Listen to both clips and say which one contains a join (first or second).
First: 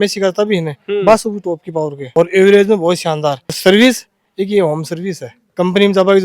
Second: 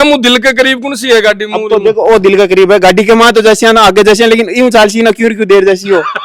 first